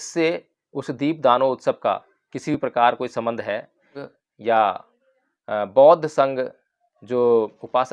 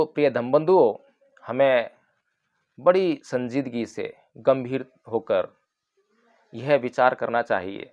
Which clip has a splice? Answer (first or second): first